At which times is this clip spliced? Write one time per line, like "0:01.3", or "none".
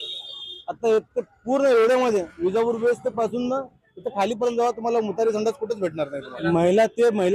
0:06.3